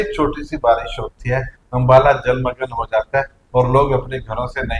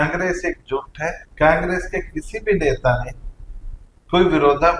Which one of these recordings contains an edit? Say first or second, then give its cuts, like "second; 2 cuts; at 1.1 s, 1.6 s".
second; 1 cut; at 1.2 s